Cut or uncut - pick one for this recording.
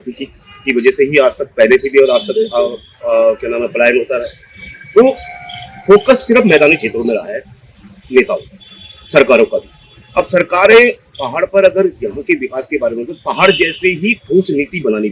uncut